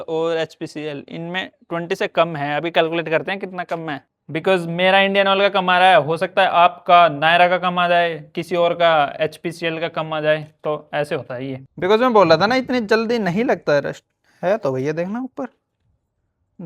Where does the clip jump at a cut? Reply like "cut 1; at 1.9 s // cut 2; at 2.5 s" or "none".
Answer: cut 1; at 4.2 s // cut 2; at 11.7 s